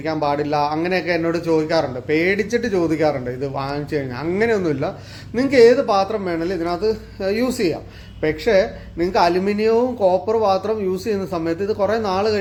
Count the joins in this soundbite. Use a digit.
0